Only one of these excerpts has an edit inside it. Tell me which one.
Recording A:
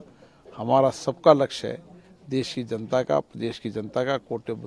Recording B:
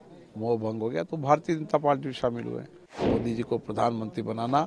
B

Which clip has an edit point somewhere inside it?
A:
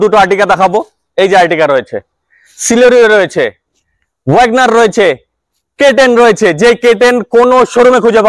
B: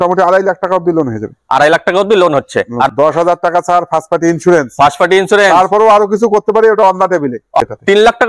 B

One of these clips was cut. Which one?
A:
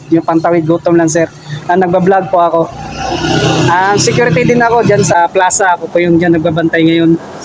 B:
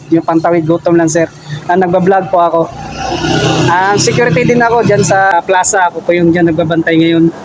A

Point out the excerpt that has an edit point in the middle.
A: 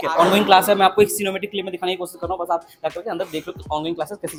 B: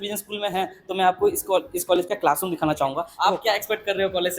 B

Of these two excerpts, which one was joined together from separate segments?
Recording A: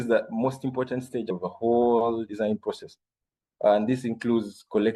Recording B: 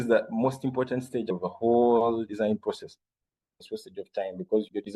B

